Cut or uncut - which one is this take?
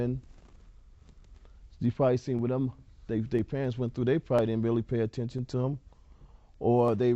cut